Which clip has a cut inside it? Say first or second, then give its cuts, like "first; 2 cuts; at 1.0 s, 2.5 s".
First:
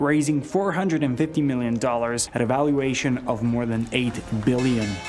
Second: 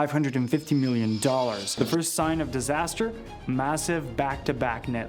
second; 1 cut; at 1.7 s